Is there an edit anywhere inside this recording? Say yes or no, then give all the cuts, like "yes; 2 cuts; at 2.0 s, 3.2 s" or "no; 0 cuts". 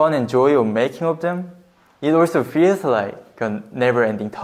no; 0 cuts